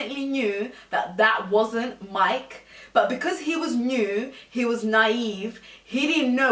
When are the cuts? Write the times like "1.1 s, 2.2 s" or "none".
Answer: none